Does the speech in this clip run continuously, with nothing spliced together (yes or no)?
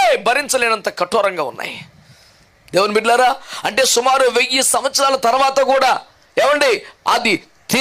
yes